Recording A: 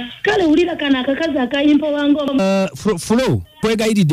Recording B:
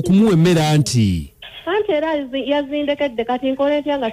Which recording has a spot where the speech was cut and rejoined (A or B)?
A